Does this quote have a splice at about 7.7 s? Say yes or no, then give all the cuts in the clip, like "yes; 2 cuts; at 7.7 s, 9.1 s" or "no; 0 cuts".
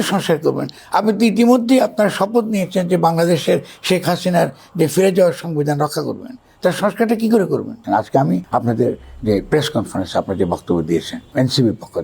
yes; 2 cuts; at 7.7 s, 8.4 s